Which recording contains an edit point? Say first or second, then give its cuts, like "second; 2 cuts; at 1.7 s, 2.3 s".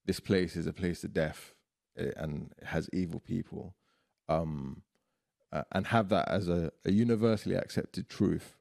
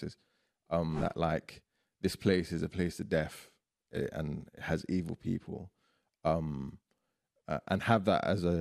second; 1 cut; at 0.9 s